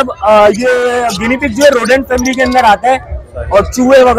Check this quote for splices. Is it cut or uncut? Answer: uncut